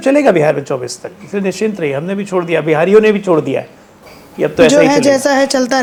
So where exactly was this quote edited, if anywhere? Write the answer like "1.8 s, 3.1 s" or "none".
none